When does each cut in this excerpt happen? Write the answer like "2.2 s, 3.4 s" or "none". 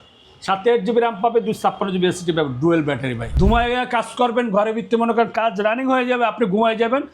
3.3 s